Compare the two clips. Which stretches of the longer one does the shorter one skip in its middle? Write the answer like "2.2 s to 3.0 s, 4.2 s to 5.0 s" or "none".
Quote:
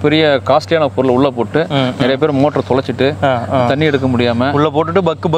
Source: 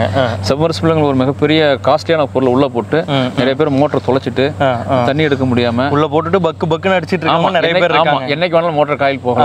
none

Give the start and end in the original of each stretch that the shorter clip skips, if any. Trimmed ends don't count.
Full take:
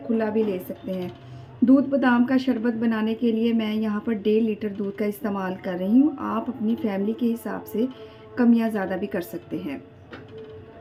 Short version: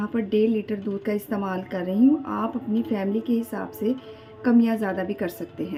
none

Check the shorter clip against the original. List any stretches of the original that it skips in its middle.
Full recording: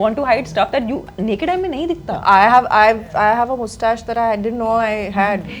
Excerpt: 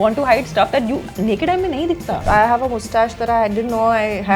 2.2 s to 3.0 s

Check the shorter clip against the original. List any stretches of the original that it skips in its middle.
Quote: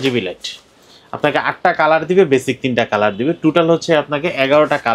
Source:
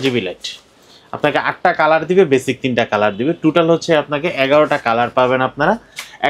none

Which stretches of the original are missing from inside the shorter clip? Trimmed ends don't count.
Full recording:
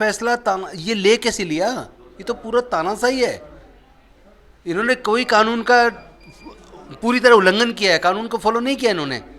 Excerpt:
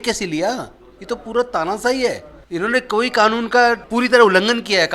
3.5 s to 4.5 s, 6.0 s to 6.9 s

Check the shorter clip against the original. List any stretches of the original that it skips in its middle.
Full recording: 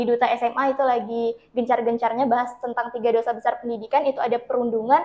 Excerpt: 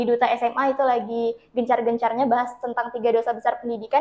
none

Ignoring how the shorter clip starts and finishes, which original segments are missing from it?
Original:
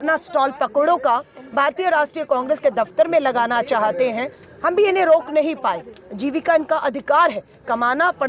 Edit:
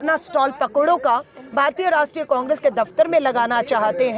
none

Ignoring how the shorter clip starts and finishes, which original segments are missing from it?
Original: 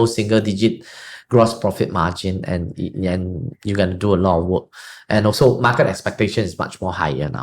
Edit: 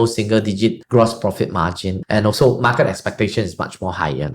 0.8 s to 1.2 s, 2.3 s to 4.9 s

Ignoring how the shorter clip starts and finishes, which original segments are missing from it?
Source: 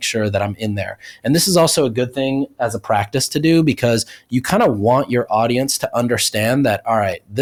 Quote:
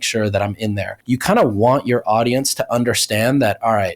0.9 s to 4.2 s

